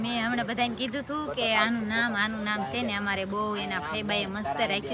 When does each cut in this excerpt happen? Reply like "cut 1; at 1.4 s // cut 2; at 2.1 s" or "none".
none